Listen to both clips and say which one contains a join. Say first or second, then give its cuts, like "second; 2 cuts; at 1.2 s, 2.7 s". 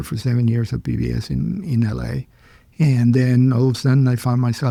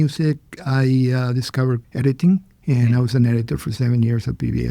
second; 2 cuts; at 1.9 s, 2.5 s